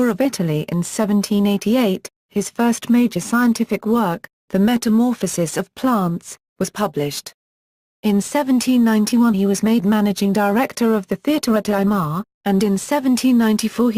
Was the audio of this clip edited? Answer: yes; 1 cut; at 3.5 s

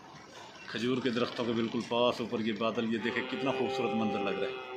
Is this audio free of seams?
yes; 0 cuts

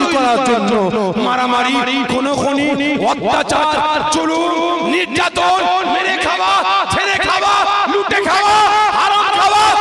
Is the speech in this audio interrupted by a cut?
no; 0 cuts

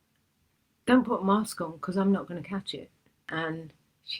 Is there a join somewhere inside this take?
yes; 1 cut; at 3.2 s

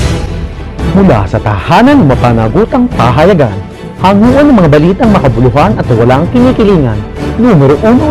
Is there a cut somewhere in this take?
yes; 1 cut; at 0.9 s

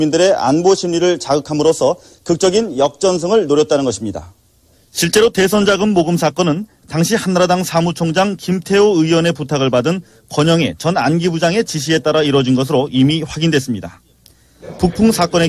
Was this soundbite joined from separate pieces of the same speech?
yes; 1 cut; at 10.7 s

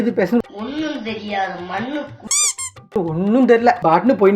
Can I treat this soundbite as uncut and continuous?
yes; 0 cuts

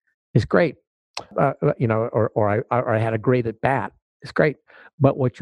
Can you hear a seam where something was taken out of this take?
yes; 1 cut; at 1.3 s

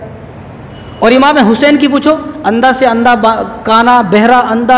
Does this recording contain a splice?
no; 0 cuts

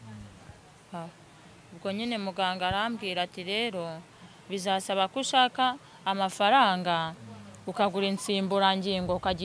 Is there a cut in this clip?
no; 0 cuts

